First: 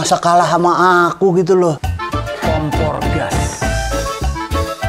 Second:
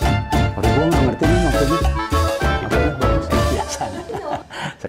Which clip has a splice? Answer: first; 1 cut; at 1.9 s

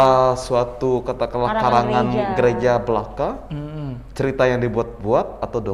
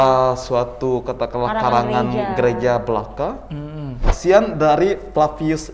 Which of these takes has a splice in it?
second; 1 cut; at 4.1 s

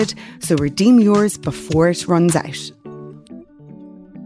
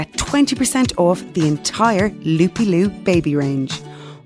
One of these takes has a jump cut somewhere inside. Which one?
first; 1 cut; at 2.5 s

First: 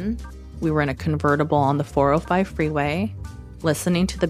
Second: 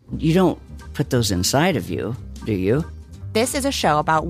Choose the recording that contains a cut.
second; 1 cut; at 2.9 s

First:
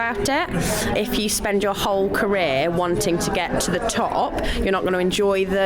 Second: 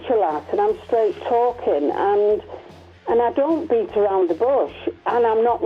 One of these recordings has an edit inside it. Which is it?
first; 1 cut; at 0.9 s

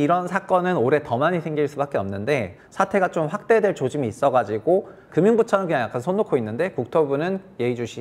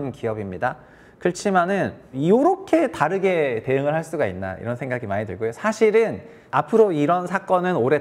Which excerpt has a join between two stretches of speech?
first; 2 cuts; at 2.5 s, 5.0 s

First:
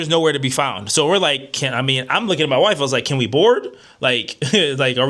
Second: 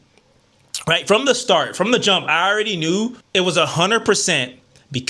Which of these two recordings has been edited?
second; 1 cut; at 3.2 s

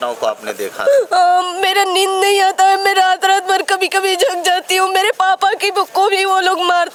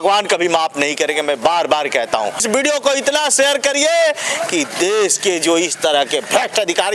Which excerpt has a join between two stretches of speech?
second; 1 cut; at 2.6 s

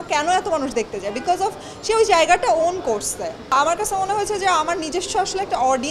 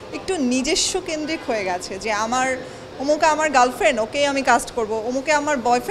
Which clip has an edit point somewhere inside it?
first; 1 cut; at 3.5 s

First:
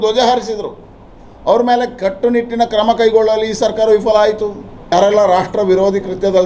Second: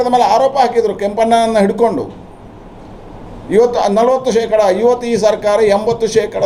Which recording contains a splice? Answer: first; 1 cut; at 4.9 s

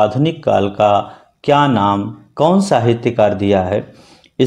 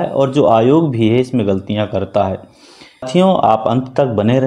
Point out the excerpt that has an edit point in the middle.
second; 1 cut; at 3.1 s

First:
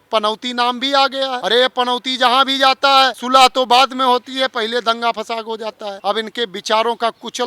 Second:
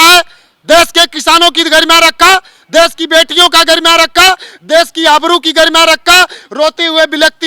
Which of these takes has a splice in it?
first; 3 cuts; at 1.4 s, 3.2 s, 5.9 s

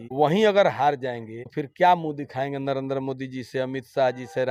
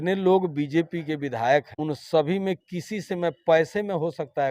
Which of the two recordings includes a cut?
second; 1 cut; at 1.7 s

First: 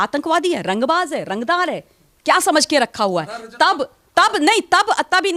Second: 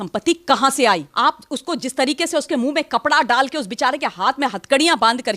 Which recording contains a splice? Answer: second; 1 cut; at 1.1 s

